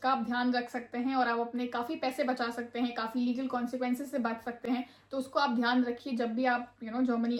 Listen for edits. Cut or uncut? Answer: uncut